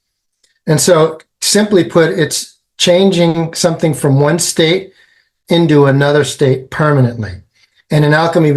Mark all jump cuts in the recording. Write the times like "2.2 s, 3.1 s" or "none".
none